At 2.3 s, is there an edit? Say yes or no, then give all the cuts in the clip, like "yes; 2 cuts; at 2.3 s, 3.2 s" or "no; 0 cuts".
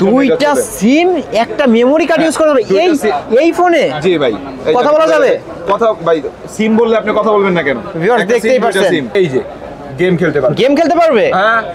no; 1 cut; at 9.1 s